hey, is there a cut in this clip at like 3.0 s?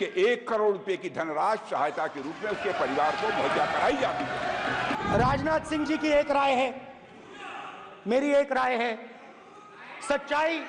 no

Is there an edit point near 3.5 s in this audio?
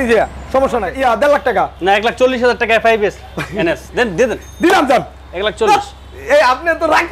no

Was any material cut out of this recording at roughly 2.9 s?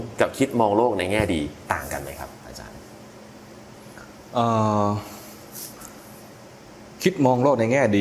no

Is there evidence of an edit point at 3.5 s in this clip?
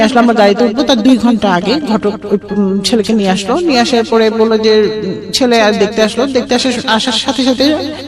no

